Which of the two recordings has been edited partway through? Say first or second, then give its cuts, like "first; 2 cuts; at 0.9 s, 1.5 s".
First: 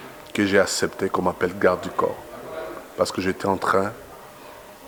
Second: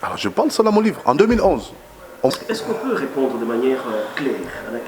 second; 1 cut; at 2.3 s